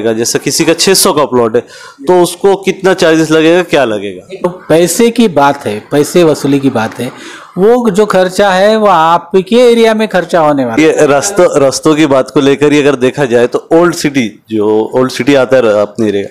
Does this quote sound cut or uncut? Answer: cut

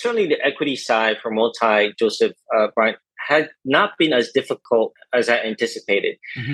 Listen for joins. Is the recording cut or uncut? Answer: uncut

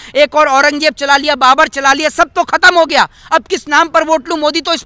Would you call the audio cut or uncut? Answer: uncut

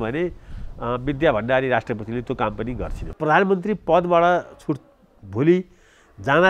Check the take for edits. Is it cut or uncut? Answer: cut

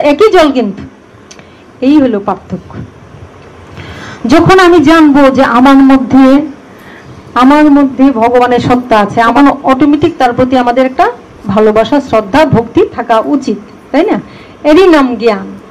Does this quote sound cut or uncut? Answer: cut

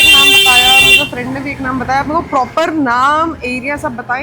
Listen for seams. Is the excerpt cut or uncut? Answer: uncut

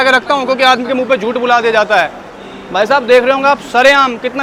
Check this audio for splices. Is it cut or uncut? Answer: uncut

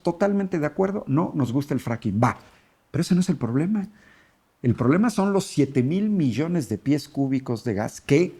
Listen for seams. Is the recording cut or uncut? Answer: uncut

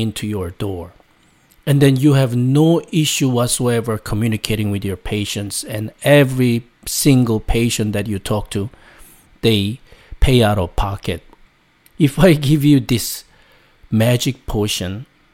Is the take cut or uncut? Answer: cut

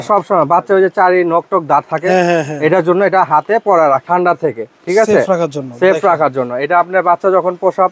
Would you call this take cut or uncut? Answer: cut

